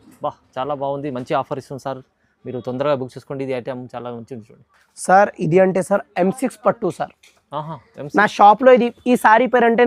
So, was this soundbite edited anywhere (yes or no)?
no